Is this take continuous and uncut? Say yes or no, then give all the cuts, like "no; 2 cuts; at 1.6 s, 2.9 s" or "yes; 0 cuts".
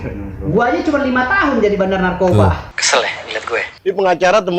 no; 1 cut; at 3.2 s